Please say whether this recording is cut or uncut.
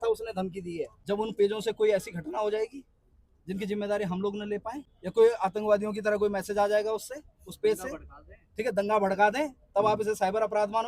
cut